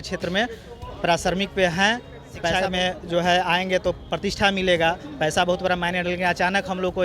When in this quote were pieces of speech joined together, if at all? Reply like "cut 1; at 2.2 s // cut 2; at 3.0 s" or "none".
cut 1; at 2.5 s